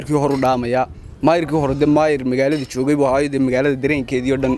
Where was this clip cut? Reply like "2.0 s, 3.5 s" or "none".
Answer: none